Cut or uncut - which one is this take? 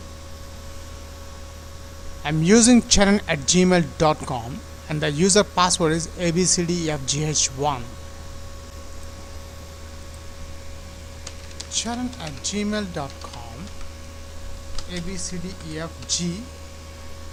uncut